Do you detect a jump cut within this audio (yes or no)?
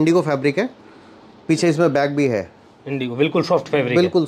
no